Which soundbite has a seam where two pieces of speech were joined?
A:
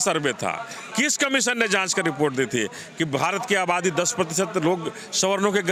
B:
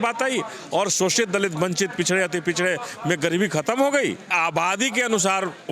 B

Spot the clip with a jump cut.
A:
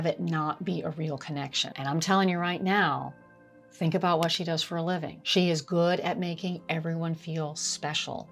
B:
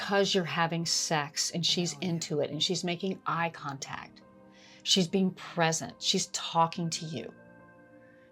A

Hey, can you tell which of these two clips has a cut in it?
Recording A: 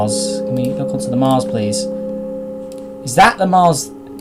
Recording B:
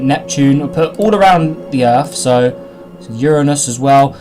B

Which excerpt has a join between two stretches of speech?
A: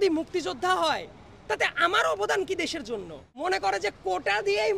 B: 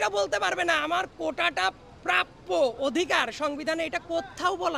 A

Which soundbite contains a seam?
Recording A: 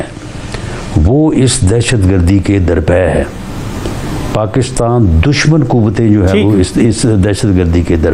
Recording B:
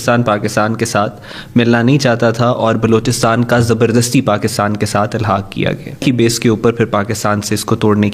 B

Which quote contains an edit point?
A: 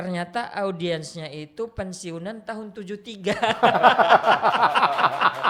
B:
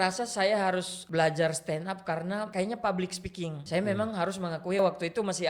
B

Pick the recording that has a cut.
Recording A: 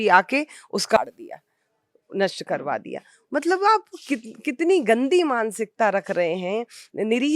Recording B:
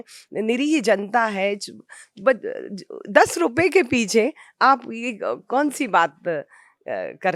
A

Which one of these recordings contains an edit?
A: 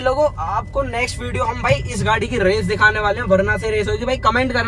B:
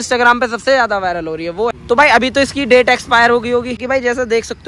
B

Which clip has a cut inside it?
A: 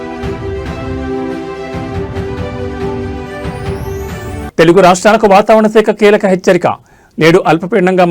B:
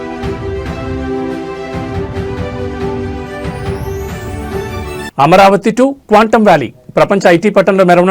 B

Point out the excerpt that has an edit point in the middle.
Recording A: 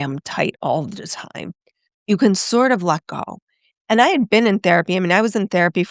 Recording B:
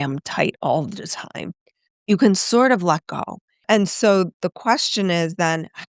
B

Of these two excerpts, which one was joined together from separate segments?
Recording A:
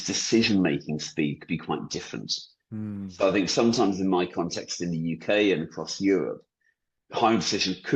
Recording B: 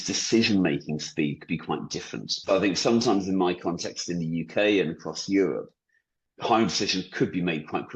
B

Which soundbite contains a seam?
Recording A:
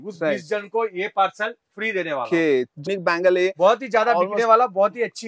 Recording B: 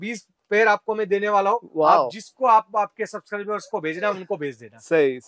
A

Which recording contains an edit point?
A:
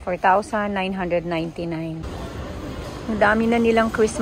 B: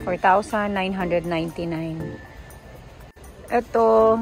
A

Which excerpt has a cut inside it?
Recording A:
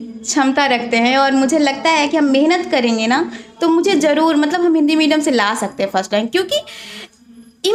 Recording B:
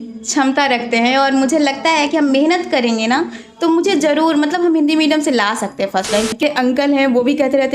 B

